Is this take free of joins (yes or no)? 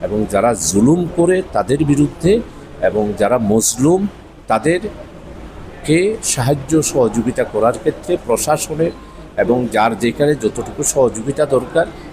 yes